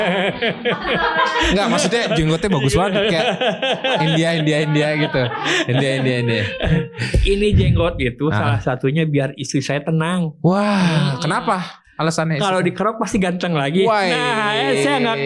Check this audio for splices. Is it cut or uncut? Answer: uncut